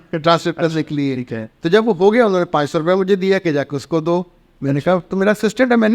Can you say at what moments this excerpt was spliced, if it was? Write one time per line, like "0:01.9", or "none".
none